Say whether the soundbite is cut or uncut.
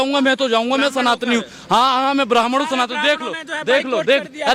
uncut